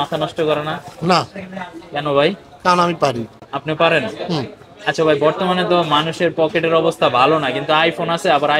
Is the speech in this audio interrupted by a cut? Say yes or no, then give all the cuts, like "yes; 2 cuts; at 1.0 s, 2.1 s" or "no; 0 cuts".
no; 0 cuts